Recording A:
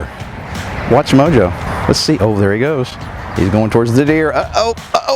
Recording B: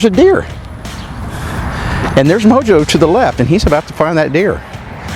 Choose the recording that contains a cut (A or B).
A